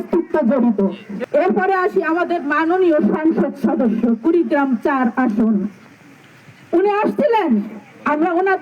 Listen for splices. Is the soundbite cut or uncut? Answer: cut